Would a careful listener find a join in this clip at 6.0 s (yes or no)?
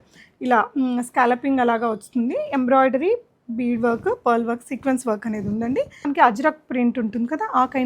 yes